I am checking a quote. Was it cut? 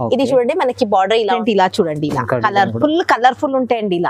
yes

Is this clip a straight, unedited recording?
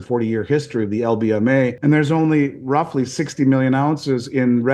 no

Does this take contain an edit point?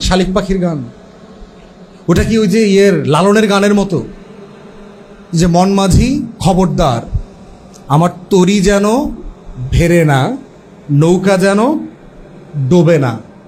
no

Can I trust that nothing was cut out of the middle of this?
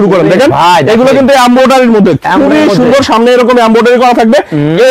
yes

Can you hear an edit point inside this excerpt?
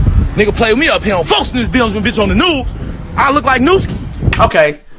no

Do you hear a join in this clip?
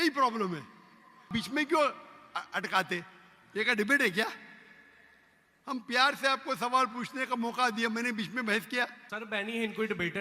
yes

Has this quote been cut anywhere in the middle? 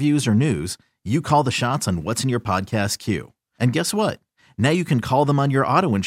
no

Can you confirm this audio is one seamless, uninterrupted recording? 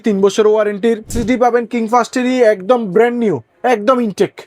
no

